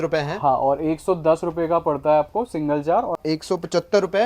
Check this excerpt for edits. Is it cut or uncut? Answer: cut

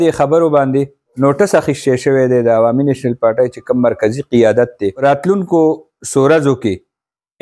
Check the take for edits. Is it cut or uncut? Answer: cut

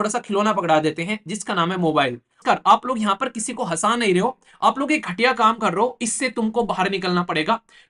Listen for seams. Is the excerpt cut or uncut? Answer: cut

